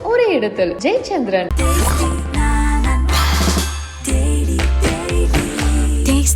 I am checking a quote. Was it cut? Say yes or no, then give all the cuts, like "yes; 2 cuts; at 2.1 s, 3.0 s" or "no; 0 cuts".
no; 0 cuts